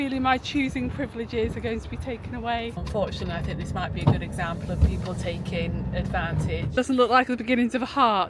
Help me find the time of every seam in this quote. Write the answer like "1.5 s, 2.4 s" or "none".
2.8 s, 6.7 s